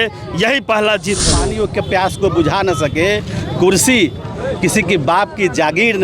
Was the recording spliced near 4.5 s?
no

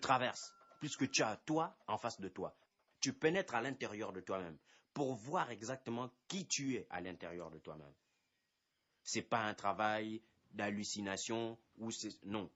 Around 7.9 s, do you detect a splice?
yes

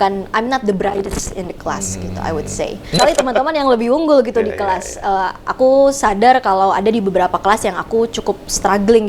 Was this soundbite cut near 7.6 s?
no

